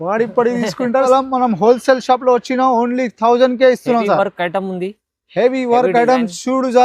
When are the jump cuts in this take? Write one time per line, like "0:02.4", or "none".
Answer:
0:01.1